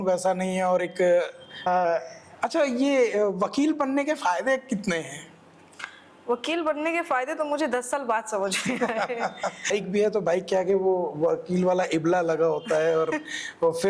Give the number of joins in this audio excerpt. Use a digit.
2